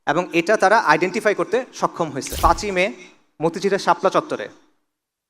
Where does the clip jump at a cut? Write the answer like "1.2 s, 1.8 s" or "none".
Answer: 2.3 s